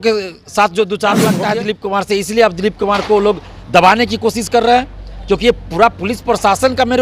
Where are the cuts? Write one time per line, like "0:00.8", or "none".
0:01.4